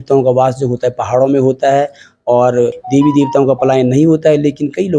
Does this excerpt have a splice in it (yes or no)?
yes